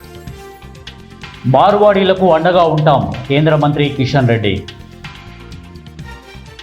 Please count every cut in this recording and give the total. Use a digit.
2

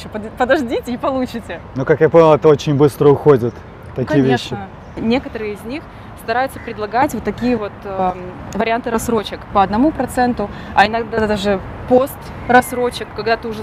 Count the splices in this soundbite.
2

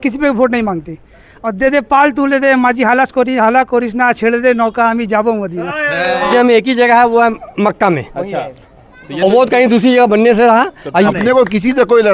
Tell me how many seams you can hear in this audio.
2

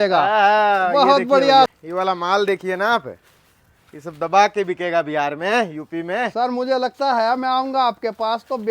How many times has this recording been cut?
1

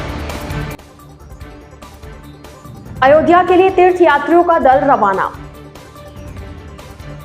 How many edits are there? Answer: 1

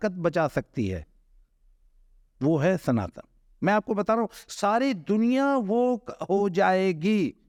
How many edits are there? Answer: 0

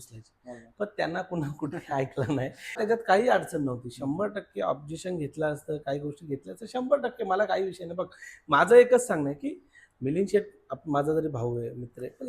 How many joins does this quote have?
1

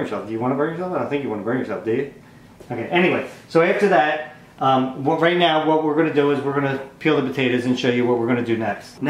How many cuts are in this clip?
1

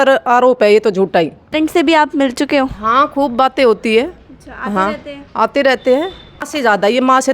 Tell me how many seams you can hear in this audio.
2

